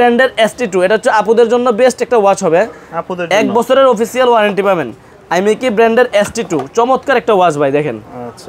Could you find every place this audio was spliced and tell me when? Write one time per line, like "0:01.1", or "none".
none